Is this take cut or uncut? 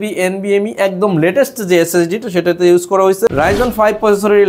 cut